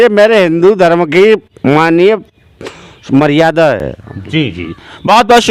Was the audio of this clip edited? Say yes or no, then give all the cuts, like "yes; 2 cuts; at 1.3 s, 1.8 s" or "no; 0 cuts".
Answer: no; 0 cuts